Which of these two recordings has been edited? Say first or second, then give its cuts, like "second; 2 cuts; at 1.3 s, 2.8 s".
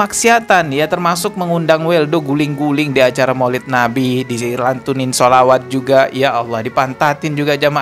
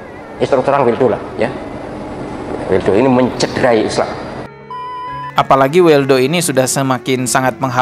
second; 1 cut; at 4.9 s